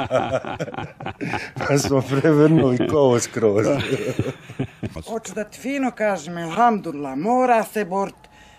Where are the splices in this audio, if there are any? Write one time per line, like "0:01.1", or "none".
0:05.0